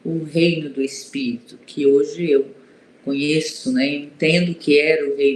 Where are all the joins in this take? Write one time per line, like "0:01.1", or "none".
none